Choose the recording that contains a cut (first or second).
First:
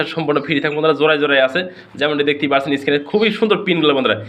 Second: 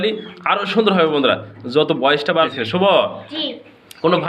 second